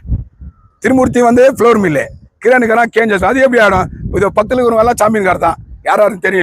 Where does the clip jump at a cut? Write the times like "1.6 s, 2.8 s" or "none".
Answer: none